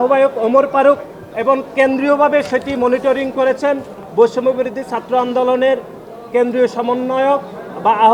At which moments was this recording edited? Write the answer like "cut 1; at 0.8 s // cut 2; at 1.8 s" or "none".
none